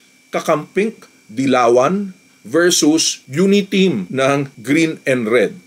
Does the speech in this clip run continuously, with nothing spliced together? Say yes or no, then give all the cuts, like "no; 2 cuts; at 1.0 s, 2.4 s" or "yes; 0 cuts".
yes; 0 cuts